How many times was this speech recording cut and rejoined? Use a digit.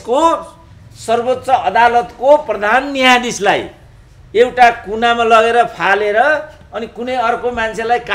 0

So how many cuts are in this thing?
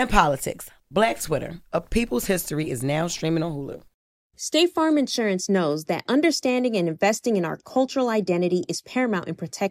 1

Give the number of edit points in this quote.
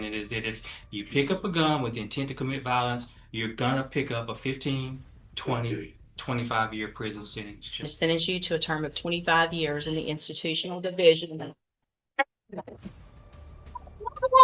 1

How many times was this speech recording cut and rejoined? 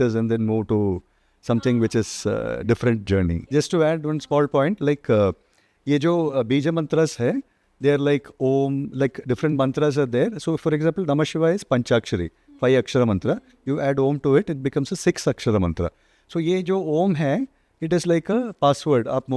0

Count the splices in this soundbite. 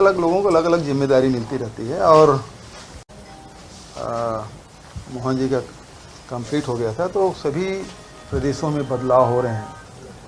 1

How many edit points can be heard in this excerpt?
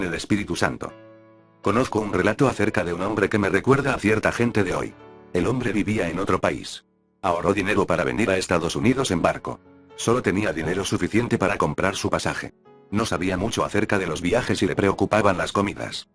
1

